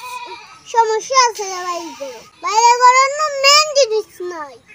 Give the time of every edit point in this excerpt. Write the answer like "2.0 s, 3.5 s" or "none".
2.3 s